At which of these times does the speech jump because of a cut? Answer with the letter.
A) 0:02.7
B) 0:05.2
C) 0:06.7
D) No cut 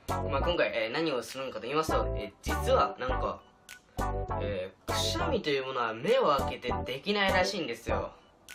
C